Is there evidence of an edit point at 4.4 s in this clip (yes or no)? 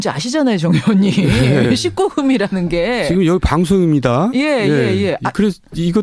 yes